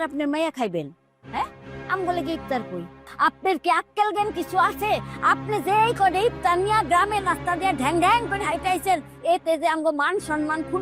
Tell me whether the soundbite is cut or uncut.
uncut